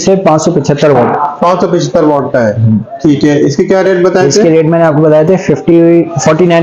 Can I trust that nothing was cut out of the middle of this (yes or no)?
yes